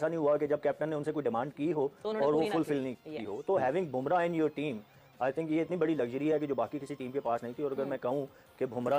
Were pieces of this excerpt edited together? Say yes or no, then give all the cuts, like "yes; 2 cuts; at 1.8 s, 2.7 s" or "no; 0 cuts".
no; 0 cuts